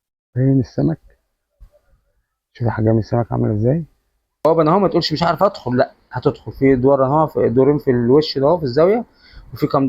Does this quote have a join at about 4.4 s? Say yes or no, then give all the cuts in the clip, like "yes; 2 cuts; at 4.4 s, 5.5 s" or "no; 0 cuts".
yes; 1 cut; at 4.4 s